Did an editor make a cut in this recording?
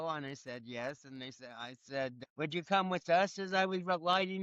yes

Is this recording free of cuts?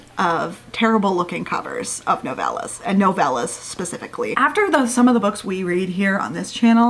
no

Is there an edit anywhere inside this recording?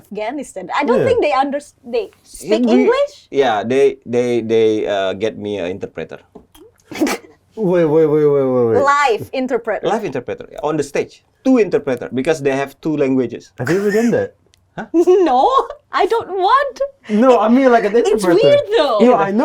no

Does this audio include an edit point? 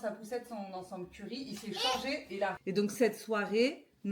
yes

